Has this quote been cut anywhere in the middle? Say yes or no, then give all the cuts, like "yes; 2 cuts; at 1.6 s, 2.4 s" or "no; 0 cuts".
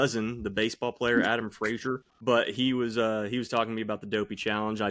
yes; 1 cut; at 2.1 s